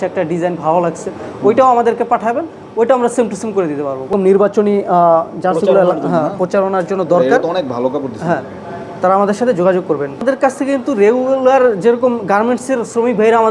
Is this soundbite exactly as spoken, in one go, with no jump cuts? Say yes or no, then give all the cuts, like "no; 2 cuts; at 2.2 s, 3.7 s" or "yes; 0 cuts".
no; 2 cuts; at 4.1 s, 10.2 s